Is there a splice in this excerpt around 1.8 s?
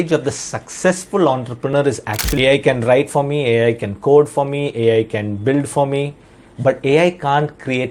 yes; 1 cut; at 1.8 s

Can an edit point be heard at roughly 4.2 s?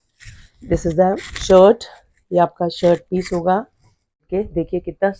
yes; 1 cut; at 4.2 s

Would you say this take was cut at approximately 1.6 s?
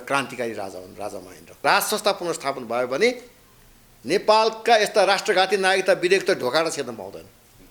yes; 1 cut; at 1.6 s

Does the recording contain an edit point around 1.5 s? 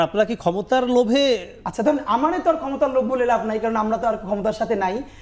yes; 1 cut; at 1.5 s

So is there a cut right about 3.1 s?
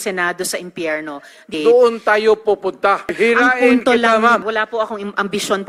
yes; 3 cuts; at 1.5 s, 3.1 s, 4.4 s

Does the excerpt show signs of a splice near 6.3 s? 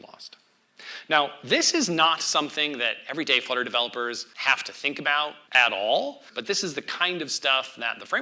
yes; 3 cuts; at 4.3 s, 5.4 s, 6.3 s

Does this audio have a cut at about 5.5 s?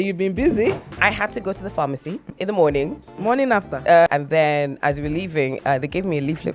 no; 4 cuts; at 0.9 s, 2.3 s, 3.2 s, 4.1 s

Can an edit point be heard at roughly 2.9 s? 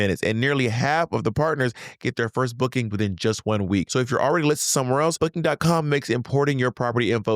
yes; 3 cuts; at 2.9 s, 3.9 s, 5.2 s

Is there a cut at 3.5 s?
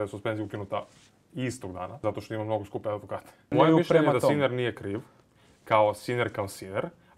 yes; 2 cuts; at 2.0 s, 3.5 s

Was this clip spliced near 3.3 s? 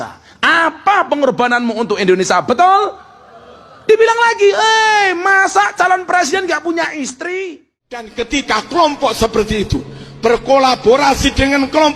no; 1 cut; at 8.1 s

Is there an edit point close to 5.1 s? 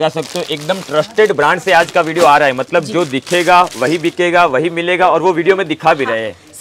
no; 0 cuts

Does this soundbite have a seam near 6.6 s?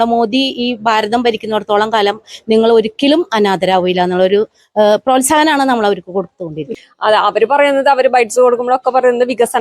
yes; 1 cut; at 6.6 s

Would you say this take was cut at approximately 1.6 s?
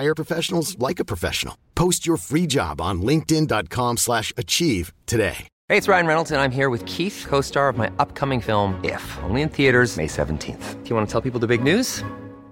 no; 1 cut; at 5.5 s

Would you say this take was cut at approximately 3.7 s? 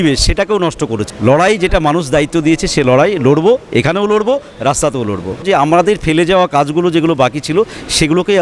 no; 2 cuts; at 1.0 s, 5.4 s

